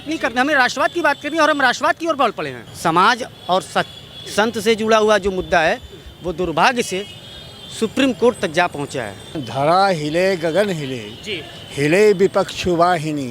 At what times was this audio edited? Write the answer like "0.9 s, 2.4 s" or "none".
2.6 s, 9.4 s